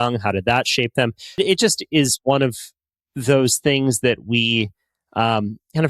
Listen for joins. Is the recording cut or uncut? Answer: cut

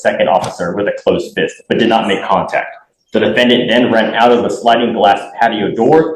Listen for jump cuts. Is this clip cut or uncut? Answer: uncut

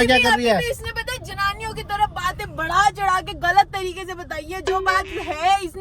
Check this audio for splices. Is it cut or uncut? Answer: uncut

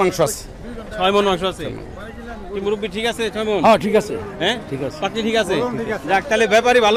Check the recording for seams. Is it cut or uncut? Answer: uncut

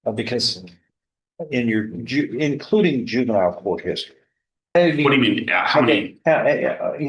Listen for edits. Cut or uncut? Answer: cut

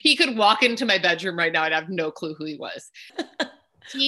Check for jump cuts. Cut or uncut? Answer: cut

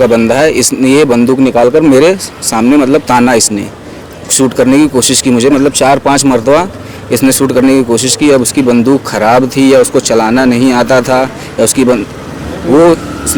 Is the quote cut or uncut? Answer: uncut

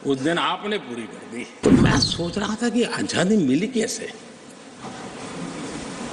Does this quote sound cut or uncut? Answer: cut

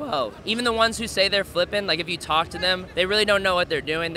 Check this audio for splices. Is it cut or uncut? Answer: uncut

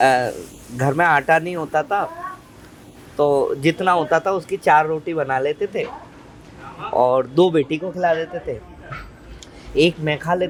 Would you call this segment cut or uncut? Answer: uncut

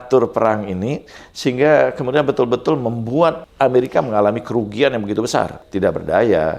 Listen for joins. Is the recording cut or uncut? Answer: cut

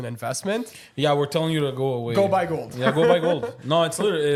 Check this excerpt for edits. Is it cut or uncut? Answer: uncut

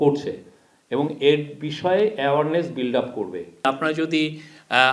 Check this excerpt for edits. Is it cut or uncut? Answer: cut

